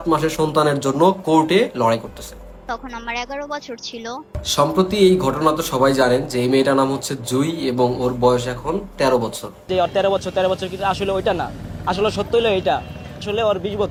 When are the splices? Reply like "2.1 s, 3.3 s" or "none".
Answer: none